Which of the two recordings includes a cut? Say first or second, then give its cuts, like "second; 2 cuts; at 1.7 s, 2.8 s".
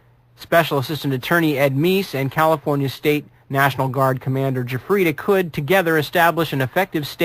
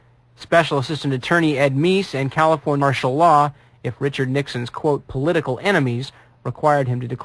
first; 1 cut; at 2.8 s